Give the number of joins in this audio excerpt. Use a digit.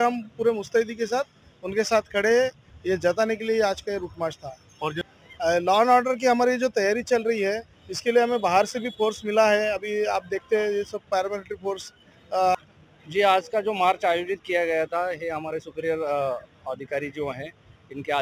2